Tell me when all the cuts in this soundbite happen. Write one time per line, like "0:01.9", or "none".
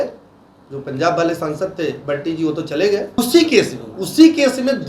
0:03.2